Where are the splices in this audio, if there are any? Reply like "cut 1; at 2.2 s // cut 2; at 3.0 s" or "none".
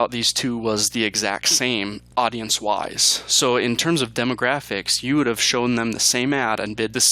cut 1; at 2.0 s